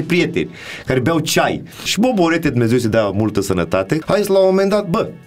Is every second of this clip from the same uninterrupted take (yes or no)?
no